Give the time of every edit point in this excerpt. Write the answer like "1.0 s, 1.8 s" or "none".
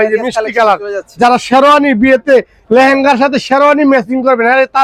none